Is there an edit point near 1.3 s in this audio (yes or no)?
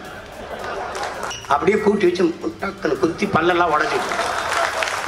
yes